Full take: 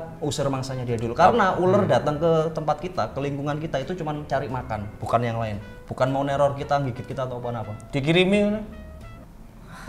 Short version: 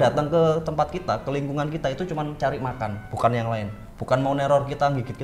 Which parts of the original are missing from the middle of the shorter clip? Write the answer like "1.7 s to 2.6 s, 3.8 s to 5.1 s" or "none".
none